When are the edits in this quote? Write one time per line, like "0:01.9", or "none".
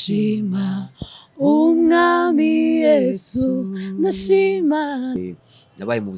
0:05.1

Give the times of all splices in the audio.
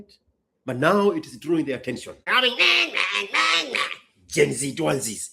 0:02.3

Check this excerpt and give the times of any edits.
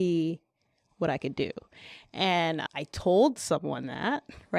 0:02.6

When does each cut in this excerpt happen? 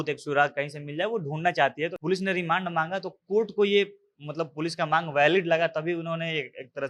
0:02.0

